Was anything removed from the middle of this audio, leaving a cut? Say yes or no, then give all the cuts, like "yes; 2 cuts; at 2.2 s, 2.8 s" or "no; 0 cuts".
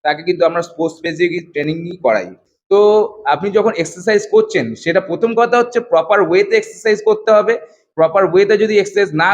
yes; 1 cut; at 2.4 s